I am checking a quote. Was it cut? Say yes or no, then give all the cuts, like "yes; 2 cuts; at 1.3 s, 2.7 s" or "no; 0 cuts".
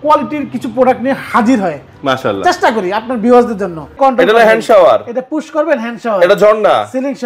yes; 1 cut; at 3.9 s